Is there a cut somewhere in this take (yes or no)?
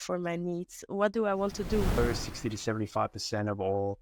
yes